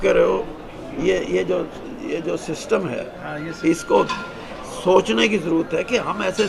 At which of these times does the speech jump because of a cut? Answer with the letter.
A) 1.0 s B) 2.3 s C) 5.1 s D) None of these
D